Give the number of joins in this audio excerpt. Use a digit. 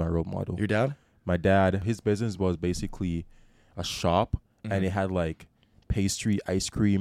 1